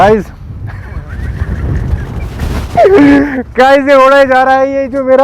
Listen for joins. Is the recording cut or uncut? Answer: uncut